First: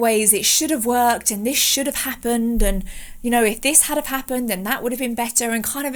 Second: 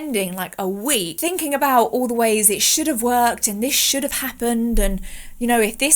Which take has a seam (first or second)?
second